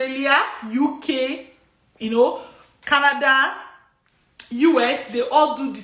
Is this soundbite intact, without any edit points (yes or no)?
yes